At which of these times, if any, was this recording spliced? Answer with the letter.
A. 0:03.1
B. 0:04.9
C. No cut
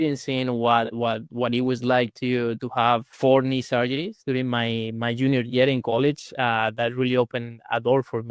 A